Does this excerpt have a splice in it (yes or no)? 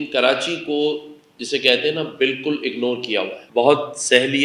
yes